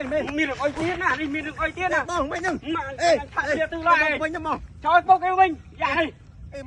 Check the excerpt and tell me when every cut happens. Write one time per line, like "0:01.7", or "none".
none

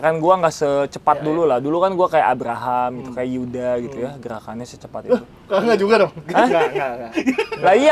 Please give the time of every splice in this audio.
none

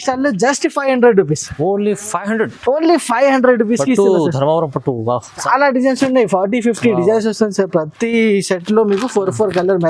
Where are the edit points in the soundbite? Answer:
0:05.3

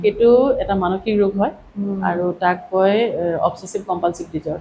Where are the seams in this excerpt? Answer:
none

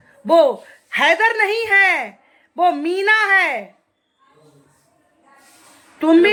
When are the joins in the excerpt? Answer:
none

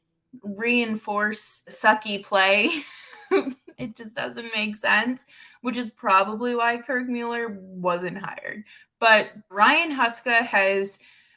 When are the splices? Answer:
0:01.8
0:09.5

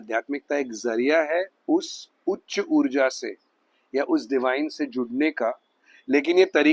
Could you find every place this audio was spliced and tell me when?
none

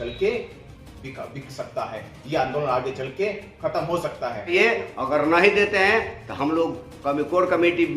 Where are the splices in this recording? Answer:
0:04.5

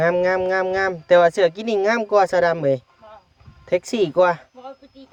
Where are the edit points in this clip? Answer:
none

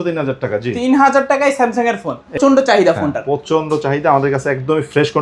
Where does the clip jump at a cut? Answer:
0:02.4

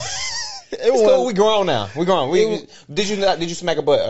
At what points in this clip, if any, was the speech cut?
none

